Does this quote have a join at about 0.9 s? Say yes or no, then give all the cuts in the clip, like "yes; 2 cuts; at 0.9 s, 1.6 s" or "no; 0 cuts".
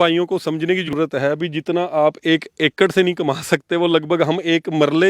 yes; 1 cut; at 0.9 s